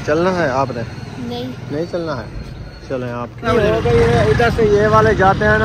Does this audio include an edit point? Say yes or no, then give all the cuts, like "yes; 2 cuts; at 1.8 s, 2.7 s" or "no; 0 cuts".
yes; 1 cut; at 3.5 s